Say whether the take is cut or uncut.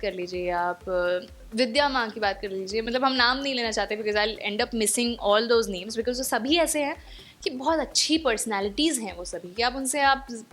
uncut